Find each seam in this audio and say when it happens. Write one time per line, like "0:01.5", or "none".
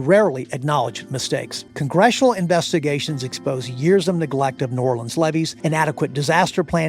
0:01.6
0:05.5